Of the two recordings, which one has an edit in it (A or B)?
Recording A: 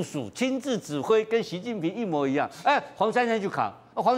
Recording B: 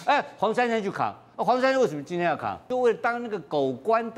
B